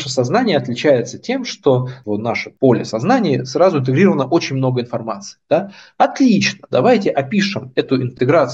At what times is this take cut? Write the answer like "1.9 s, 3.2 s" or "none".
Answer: 2.0 s